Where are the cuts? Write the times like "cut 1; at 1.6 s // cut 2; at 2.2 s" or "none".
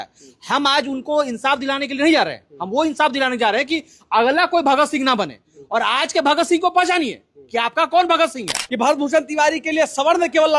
cut 1; at 8.6 s